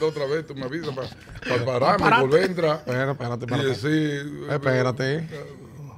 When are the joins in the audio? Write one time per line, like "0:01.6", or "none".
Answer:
none